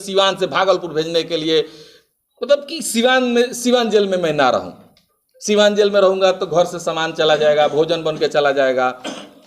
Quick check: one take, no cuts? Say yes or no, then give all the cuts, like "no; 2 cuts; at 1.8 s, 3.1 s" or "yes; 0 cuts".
yes; 0 cuts